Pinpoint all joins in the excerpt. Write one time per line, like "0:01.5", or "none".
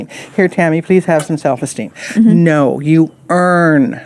none